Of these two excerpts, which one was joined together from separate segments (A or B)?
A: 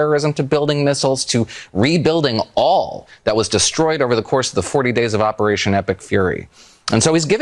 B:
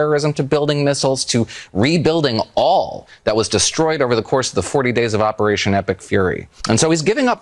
B